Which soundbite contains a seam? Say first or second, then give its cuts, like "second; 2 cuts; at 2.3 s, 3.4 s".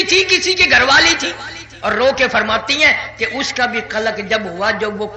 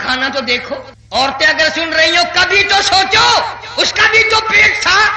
second; 1 cut; at 0.9 s